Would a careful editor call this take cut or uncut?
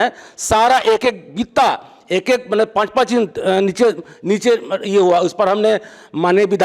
uncut